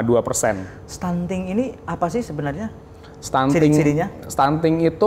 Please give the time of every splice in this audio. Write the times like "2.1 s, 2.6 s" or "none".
none